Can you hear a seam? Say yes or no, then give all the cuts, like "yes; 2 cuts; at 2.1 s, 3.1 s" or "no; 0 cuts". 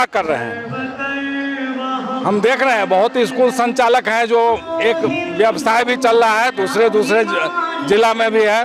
no; 0 cuts